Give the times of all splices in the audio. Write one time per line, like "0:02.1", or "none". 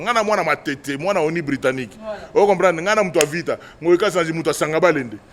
none

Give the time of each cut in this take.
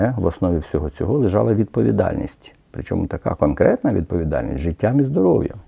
none

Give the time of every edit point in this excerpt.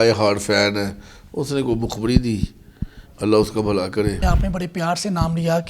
0:04.2

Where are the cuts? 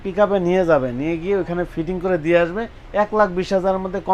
none

